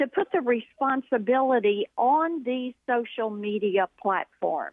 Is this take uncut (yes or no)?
yes